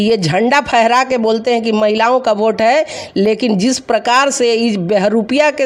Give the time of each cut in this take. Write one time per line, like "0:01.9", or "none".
none